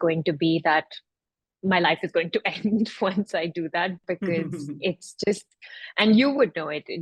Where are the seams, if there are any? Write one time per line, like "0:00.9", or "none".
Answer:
none

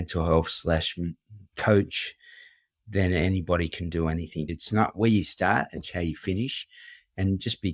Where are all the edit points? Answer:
0:04.6

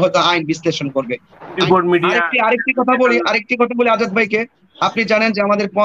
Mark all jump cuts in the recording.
0:01.5

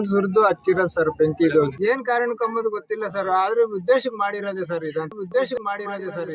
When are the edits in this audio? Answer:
0:01.7
0:05.1

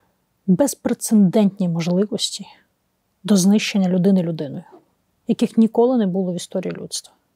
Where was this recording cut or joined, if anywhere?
none

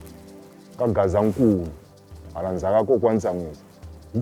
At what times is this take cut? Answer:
none

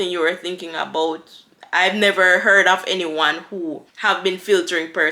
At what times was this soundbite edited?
0:03.9

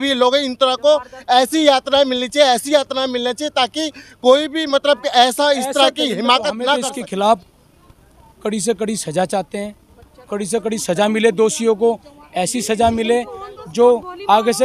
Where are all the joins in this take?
0:06.9

